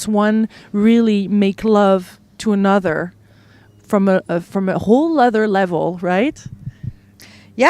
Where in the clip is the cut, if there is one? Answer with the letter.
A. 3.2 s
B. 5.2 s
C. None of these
B